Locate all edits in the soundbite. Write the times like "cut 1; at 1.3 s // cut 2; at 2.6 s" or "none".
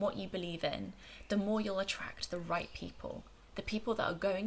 none

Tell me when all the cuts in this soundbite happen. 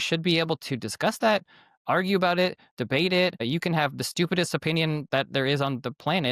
cut 1; at 3.4 s

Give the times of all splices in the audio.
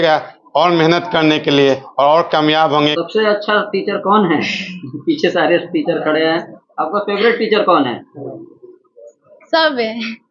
cut 1; at 3.0 s

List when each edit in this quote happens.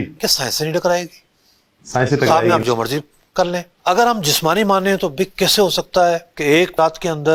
none

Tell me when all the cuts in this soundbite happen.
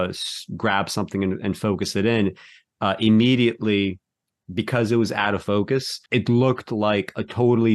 cut 1; at 6.0 s

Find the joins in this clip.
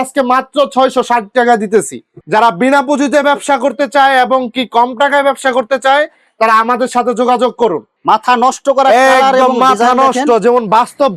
cut 1; at 2.1 s // cut 2; at 7.8 s

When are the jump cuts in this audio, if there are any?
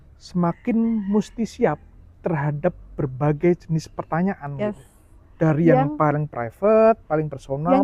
none

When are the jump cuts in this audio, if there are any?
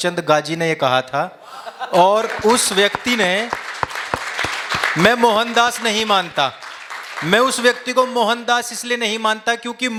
none

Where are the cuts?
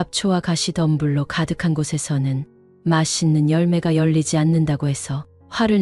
none

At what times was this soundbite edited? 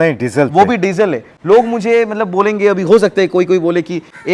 none

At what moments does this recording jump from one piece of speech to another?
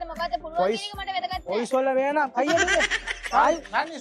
cut 1; at 3.1 s

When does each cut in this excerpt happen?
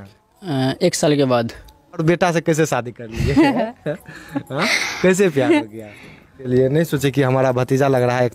cut 1; at 2.0 s // cut 2; at 6.4 s

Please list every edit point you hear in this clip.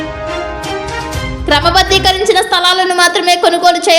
cut 1; at 0.9 s

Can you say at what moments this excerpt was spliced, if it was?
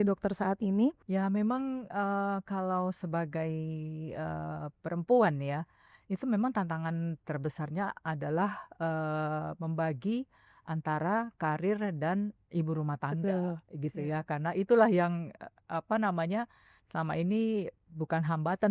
cut 1; at 1.0 s

